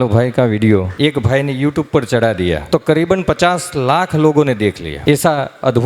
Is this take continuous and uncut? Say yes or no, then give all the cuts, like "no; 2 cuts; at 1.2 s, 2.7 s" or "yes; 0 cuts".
no; 3 cuts; at 0.9 s, 2.6 s, 4.9 s